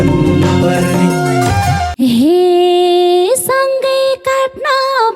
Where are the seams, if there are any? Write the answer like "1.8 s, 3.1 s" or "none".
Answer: 1.9 s